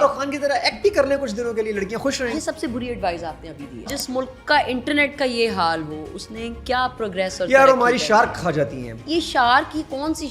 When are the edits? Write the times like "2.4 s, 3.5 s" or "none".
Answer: 2.2 s, 3.9 s, 8.9 s